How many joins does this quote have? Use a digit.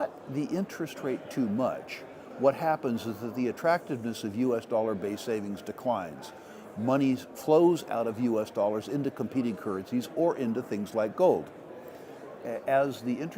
0